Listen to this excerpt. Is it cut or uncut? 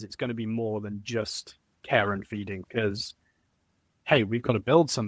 cut